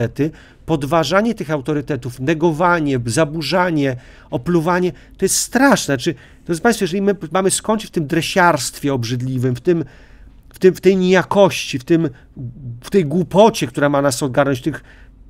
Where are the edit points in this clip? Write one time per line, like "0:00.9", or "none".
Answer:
none